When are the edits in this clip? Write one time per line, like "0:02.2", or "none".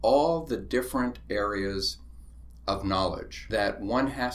0:03.3